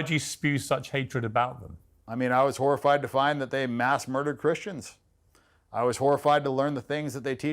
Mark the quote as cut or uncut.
cut